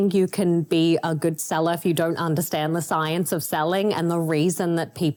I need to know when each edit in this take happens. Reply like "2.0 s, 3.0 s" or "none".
none

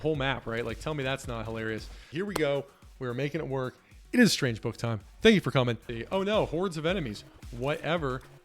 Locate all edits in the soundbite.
2.0 s, 5.9 s

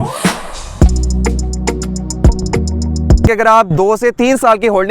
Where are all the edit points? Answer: 3.3 s

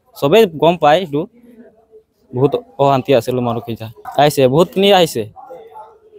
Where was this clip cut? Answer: 3.9 s

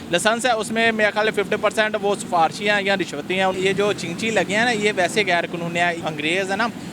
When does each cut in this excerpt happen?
3.5 s, 6.0 s

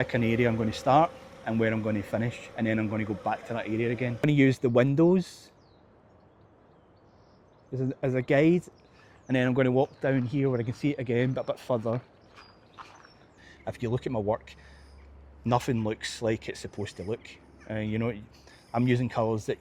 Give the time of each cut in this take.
4.2 s, 13.4 s

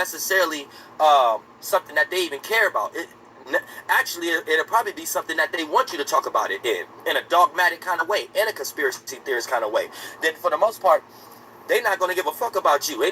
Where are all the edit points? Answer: 4.7 s

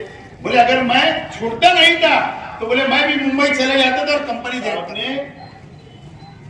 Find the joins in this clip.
4.7 s

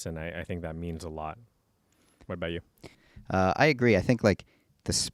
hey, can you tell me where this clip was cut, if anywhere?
2.9 s

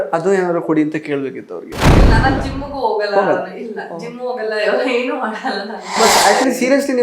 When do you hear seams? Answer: 1.9 s, 5.9 s

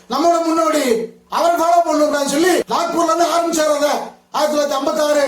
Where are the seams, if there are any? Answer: 2.7 s

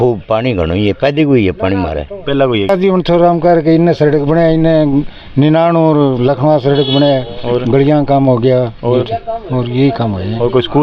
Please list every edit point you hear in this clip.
2.7 s

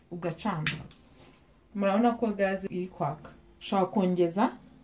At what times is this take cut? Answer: 2.6 s

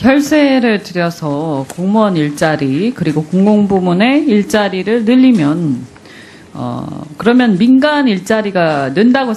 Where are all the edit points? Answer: none

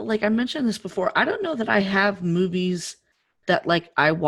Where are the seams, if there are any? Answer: none

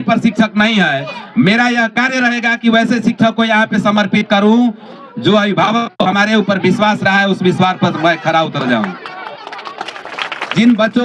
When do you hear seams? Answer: none

